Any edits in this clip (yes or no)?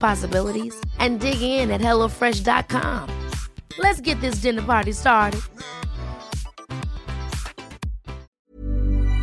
yes